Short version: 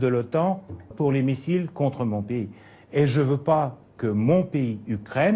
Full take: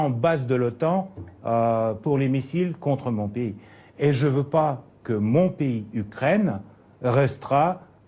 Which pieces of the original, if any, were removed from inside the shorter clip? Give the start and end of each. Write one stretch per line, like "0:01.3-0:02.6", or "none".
0:01.4-0:02.0